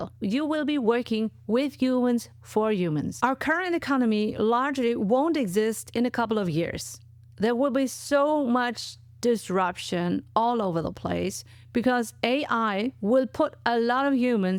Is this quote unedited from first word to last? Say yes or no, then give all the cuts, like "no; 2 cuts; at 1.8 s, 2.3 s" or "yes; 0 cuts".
yes; 0 cuts